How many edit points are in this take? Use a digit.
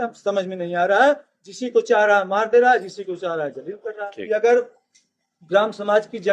1